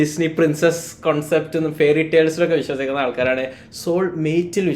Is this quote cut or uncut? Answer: uncut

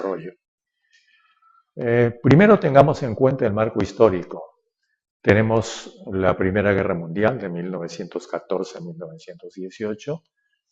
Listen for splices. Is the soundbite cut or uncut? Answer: cut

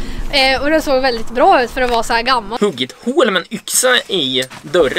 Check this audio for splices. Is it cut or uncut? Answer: cut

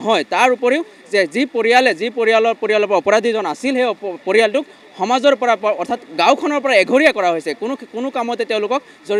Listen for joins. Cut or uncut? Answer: uncut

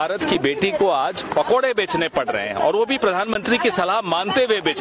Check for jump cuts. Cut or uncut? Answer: uncut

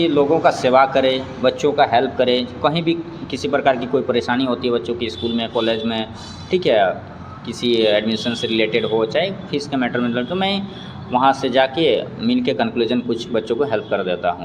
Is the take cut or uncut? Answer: uncut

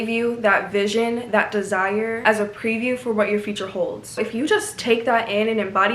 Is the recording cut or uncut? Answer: uncut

